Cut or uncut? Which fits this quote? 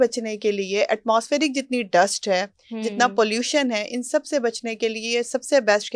uncut